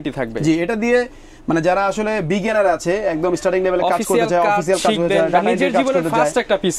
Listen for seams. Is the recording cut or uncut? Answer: uncut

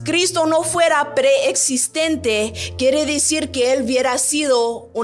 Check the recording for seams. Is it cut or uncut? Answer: uncut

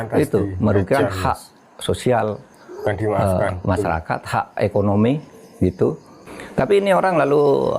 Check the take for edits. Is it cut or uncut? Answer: cut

